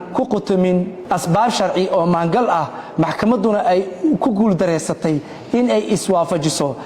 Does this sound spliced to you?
yes; 1 cut; at 1.0 s

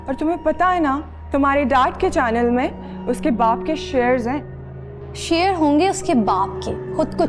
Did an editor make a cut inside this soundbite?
no; 0 cuts

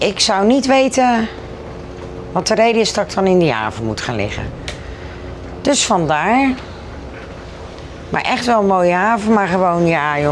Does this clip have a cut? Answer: no; 0 cuts

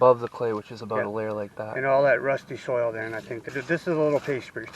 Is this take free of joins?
no; 1 cut; at 3.4 s

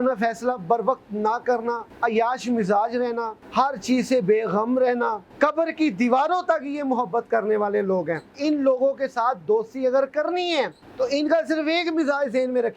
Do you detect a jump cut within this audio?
yes; 5 cuts; at 1.9 s, 3.4 s, 5.2 s, 8.3 s, 10.8 s

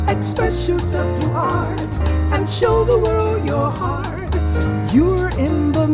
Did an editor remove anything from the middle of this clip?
no; 0 cuts

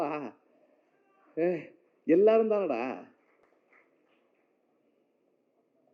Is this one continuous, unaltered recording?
no; 1 cut; at 3.4 s

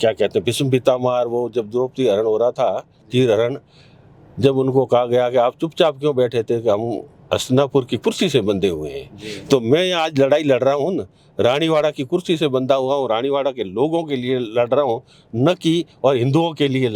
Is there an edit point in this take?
no; 0 cuts

